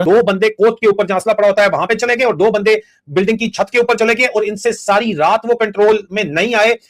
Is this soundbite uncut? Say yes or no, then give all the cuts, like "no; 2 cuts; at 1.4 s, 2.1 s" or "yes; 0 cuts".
yes; 0 cuts